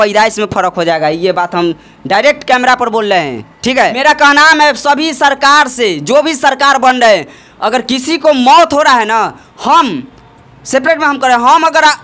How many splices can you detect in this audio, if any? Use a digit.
1